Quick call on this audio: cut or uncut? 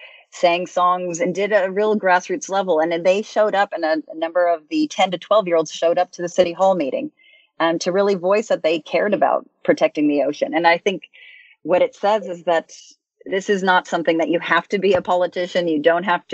cut